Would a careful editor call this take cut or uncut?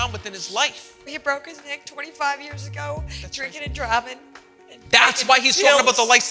cut